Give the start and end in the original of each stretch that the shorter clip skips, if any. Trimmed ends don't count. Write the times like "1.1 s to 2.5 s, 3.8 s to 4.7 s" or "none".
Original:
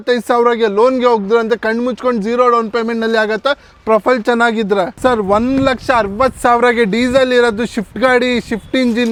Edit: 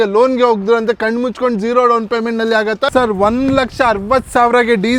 3.5 s to 5.0 s